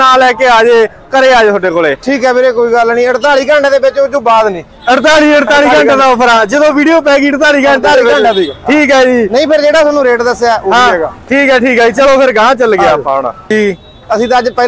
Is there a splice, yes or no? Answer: yes